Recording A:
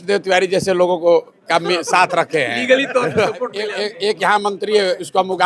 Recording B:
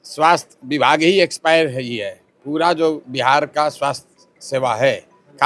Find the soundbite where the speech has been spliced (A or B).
A